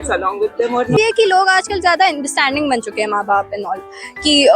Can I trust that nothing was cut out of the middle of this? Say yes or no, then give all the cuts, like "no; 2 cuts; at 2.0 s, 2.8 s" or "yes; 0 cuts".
no; 1 cut; at 0.9 s